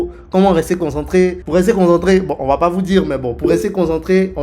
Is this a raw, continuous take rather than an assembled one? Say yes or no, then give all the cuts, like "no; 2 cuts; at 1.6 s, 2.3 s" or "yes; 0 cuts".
no; 1 cut; at 1.4 s